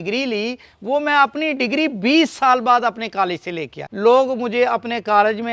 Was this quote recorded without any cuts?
no; 1 cut; at 3.8 s

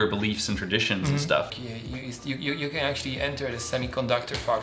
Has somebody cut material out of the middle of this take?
yes; 1 cut; at 1.5 s

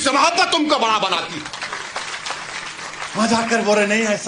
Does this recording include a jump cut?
no; 0 cuts

